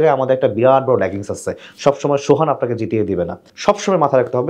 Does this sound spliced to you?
yes; 1 cut; at 3.4 s

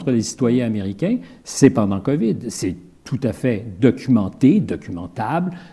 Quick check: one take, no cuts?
yes; 0 cuts

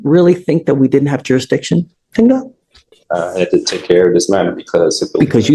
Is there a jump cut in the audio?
no; 0 cuts

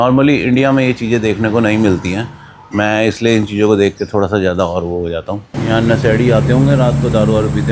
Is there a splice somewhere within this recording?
yes; 1 cut; at 5.5 s

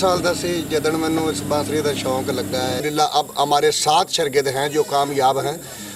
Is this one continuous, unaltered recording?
no; 1 cut; at 2.8 s

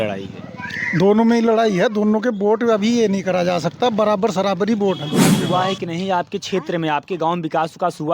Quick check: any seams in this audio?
yes; 1 cut; at 5.3 s

